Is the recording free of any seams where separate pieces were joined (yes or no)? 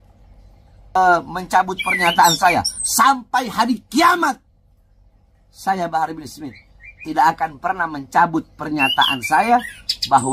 no